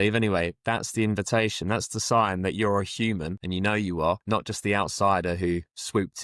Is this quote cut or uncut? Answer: cut